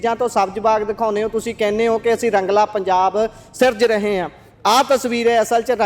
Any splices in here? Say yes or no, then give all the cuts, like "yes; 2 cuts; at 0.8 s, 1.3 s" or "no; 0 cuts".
no; 0 cuts